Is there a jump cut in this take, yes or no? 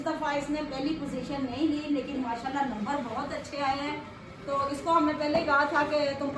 no